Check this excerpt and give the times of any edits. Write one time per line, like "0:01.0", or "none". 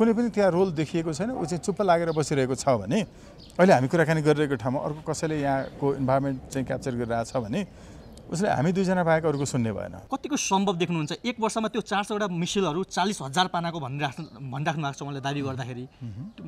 0:09.9